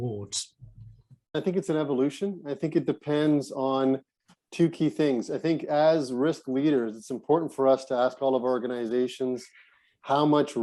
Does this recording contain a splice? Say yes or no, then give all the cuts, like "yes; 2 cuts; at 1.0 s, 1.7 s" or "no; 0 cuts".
yes; 1 cut; at 1.3 s